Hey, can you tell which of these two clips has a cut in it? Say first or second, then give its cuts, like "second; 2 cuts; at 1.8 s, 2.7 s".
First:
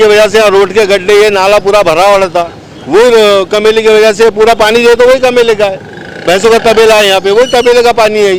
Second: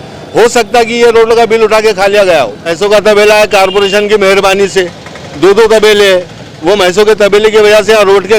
second; 1 cut; at 2.7 s